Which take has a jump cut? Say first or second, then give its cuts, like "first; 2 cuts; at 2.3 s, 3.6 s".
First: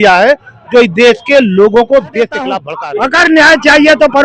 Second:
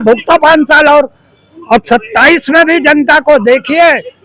first; 1 cut; at 2.7 s